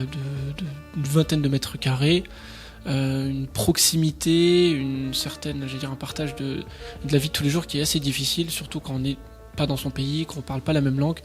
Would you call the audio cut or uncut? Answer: uncut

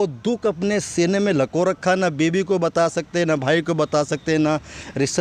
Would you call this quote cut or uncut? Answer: uncut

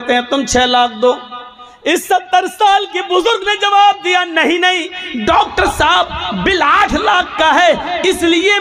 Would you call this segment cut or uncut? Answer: uncut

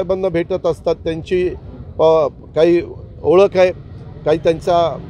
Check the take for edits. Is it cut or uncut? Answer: uncut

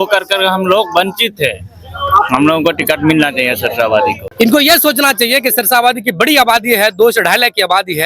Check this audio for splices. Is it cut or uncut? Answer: cut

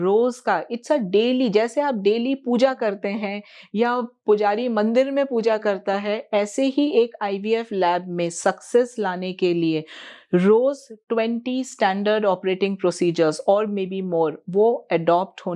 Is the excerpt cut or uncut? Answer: uncut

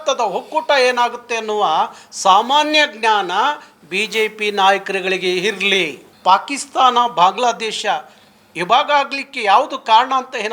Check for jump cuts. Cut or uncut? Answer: cut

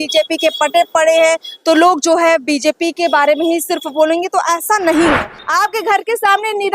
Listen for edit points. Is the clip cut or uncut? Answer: cut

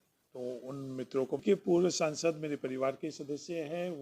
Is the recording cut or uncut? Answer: cut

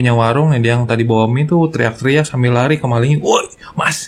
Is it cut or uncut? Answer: uncut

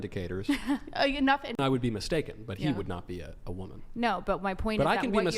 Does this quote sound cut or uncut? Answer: cut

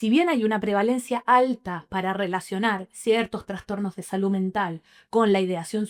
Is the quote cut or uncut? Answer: uncut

